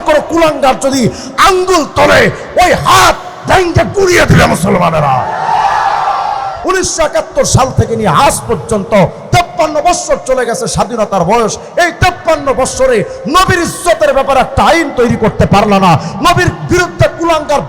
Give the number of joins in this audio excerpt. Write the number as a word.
one